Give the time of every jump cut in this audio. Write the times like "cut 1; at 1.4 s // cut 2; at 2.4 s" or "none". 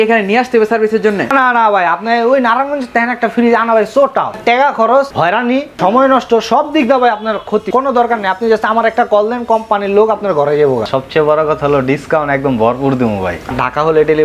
cut 1; at 1.3 s // cut 2; at 4.4 s // cut 3; at 5.5 s // cut 4; at 7.7 s // cut 5; at 10.9 s // cut 6; at 13.5 s